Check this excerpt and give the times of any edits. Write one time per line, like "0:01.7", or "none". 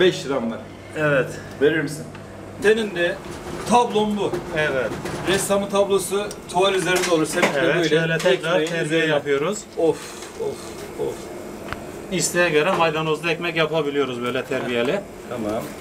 0:02.5